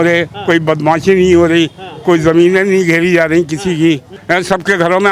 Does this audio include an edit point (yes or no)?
yes